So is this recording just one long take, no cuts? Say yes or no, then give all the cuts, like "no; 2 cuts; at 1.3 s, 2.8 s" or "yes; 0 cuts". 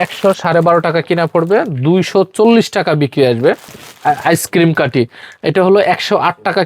no; 1 cut; at 3.8 s